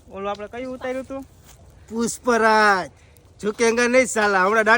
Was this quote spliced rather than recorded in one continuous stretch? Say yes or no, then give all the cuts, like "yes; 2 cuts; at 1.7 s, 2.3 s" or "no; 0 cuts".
no; 0 cuts